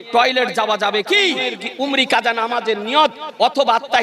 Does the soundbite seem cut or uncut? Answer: cut